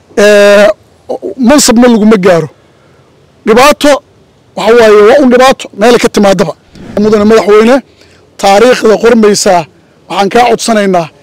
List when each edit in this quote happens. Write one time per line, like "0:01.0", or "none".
0:07.0